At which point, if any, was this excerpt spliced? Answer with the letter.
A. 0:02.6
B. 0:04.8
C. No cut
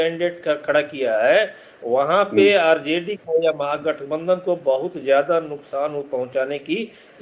C